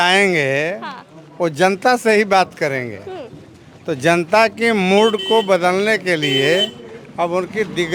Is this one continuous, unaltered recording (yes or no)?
yes